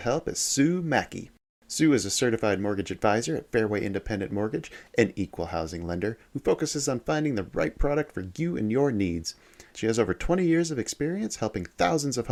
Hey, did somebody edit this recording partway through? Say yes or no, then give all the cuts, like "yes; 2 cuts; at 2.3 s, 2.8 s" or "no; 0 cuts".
no; 0 cuts